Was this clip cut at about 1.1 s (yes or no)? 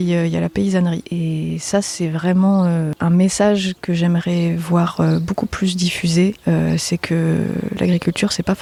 no